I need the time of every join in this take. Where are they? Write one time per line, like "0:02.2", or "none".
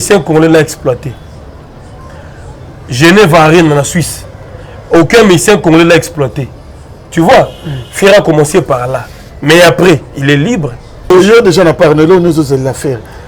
0:11.1